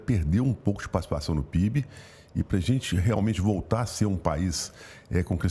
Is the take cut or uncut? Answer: uncut